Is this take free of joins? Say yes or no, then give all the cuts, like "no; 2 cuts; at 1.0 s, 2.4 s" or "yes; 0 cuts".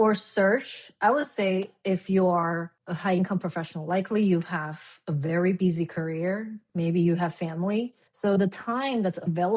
yes; 0 cuts